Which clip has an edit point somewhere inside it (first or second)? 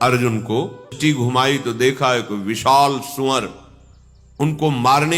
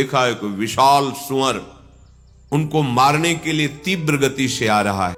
first